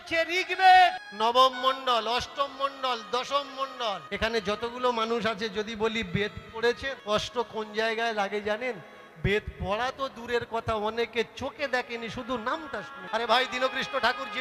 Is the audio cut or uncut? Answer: cut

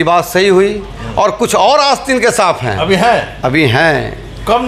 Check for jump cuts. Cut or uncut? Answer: uncut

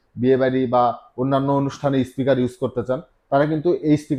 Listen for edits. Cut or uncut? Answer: uncut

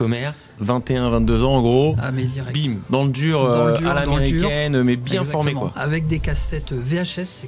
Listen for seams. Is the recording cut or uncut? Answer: uncut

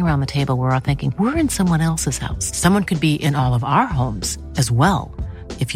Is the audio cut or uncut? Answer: uncut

